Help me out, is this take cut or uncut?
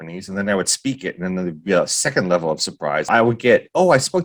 cut